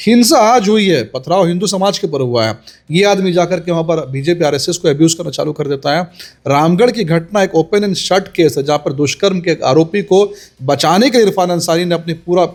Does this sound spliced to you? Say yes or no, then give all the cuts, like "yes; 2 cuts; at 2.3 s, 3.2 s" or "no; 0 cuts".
no; 0 cuts